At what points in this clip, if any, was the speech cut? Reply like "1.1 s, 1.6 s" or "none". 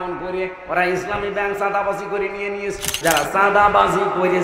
3.0 s